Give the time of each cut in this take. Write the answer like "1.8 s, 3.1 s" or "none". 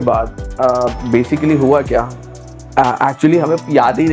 none